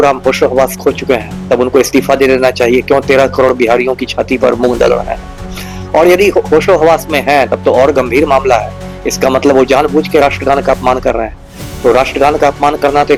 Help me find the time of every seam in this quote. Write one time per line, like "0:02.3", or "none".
none